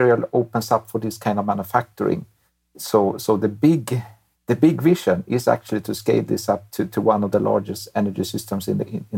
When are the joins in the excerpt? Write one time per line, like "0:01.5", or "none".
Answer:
0:02.7